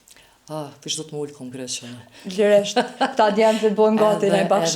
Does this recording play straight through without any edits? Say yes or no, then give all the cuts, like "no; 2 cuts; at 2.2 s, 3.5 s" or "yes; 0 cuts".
yes; 0 cuts